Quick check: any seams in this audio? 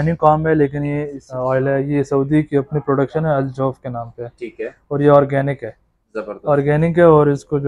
yes; 1 cut; at 1.2 s

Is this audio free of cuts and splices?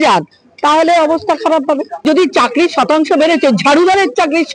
no; 1 cut; at 2.0 s

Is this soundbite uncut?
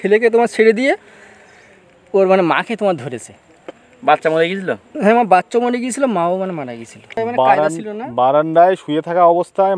no; 1 cut; at 7.2 s

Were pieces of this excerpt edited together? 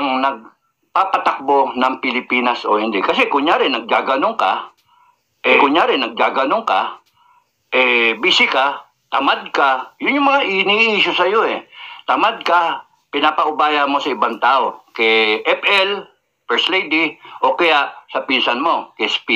no; 0 cuts

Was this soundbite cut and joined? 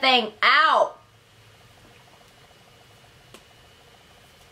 no; 0 cuts

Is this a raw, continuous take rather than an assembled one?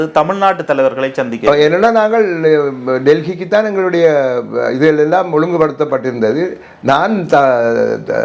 yes; 0 cuts

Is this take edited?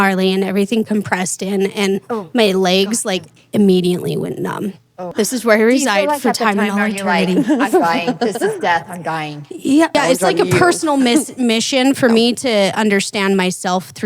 yes; 2 cuts; at 5.1 s, 10.0 s

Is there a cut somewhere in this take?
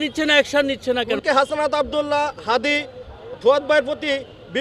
yes; 1 cut; at 1.2 s

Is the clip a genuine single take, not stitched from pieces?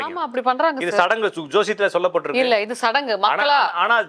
yes; 0 cuts

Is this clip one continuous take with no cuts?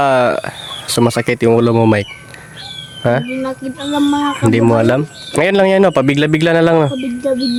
yes; 0 cuts

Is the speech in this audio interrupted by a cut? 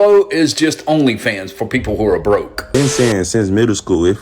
yes; 1 cut; at 2.6 s

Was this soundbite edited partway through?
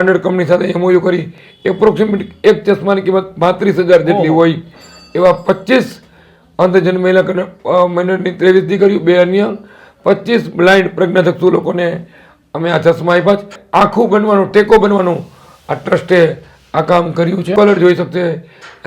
yes; 2 cuts; at 13.6 s, 17.5 s

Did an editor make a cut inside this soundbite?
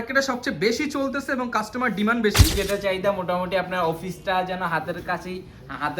yes; 1 cut; at 2.5 s

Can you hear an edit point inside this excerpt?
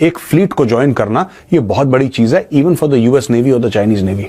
no; 0 cuts

